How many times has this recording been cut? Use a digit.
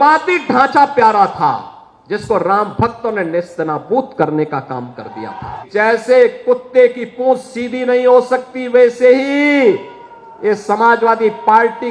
1